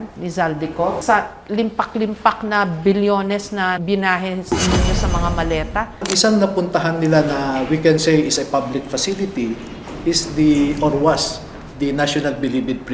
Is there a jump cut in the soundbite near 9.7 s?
no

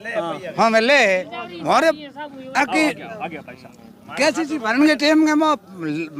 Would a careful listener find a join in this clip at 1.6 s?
no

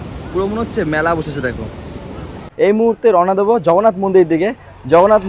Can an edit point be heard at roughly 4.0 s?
no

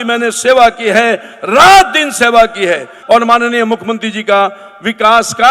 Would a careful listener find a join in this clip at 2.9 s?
yes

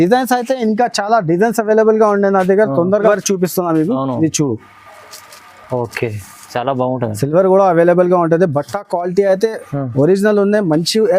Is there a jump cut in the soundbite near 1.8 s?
no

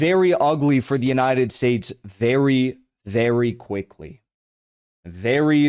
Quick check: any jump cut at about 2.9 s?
no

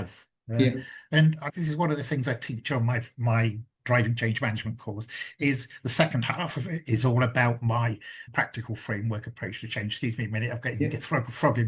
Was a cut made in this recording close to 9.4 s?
no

